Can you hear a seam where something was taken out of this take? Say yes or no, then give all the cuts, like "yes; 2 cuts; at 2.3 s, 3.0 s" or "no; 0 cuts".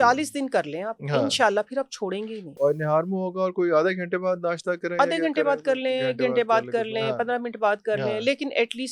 no; 0 cuts